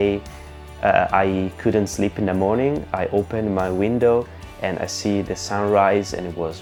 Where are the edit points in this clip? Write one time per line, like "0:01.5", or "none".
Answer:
none